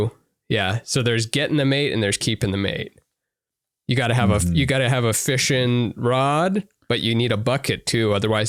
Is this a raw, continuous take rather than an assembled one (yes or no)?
yes